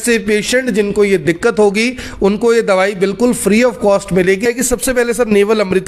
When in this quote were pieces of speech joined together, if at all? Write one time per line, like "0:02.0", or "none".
0:04.5